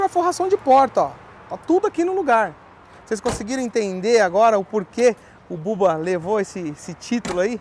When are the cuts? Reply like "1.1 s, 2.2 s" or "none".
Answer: none